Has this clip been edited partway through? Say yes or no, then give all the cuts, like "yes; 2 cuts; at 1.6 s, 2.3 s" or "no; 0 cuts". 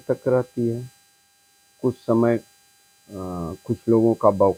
no; 0 cuts